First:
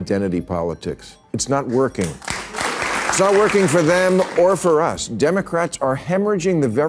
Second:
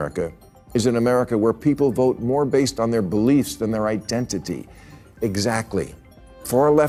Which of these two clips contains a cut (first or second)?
first